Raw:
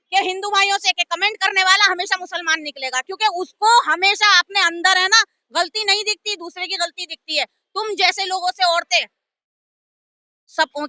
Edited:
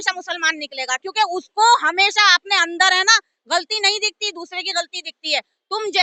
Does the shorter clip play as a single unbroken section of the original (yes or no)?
yes